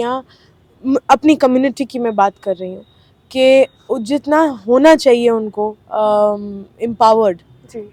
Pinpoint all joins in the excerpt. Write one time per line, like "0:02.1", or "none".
none